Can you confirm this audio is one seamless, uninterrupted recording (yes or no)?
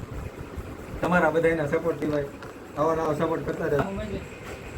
no